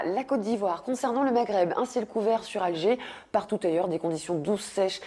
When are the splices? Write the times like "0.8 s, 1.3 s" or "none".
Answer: 2.8 s